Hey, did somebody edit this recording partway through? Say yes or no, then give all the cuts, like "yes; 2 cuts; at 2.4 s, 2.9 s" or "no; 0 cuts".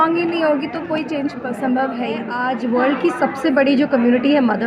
yes; 1 cut; at 2.3 s